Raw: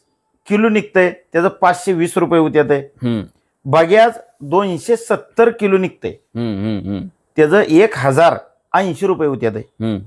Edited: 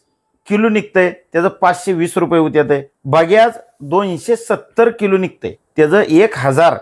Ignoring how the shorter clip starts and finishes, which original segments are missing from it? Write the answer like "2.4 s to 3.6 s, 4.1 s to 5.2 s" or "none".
2.9 s to 3.5 s, 6.1 s to 7.1 s